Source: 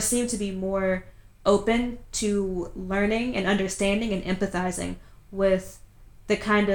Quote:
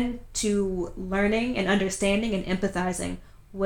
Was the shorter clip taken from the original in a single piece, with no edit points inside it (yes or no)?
yes